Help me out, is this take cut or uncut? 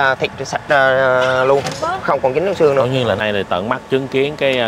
cut